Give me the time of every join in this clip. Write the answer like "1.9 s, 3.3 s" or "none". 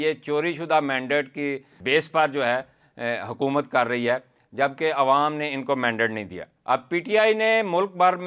none